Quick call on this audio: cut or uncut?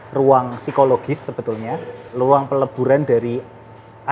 cut